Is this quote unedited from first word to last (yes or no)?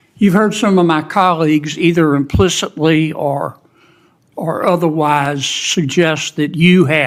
yes